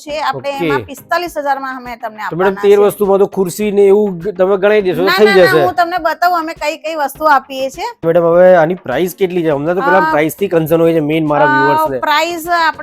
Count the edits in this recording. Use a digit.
1